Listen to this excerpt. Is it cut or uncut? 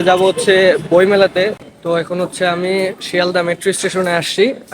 cut